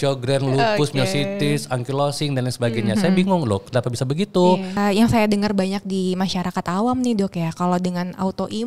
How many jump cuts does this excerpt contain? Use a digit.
1